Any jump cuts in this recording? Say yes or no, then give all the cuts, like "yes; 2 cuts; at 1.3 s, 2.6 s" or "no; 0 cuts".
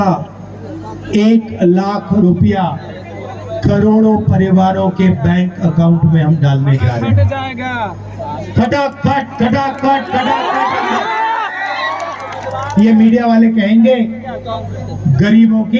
no; 0 cuts